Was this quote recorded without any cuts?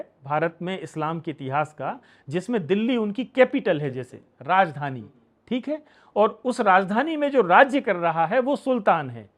yes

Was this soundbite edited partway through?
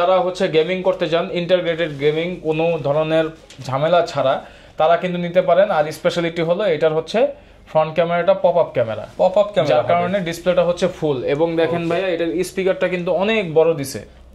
no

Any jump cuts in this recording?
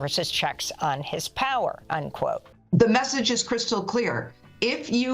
yes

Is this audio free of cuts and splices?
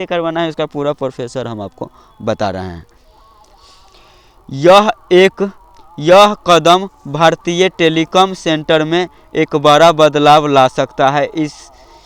yes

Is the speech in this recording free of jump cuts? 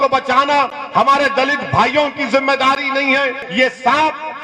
no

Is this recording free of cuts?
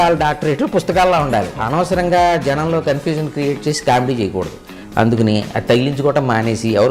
no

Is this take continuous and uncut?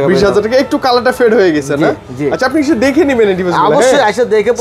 yes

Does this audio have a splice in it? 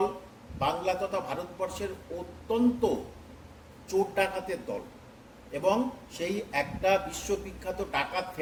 no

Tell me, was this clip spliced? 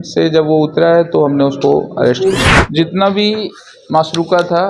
yes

